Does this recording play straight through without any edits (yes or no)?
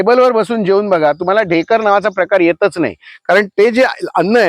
yes